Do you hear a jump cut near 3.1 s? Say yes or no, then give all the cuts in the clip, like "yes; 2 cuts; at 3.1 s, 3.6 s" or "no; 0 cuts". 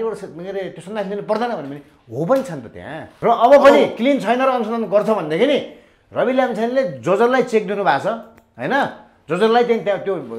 yes; 1 cut; at 3.1 s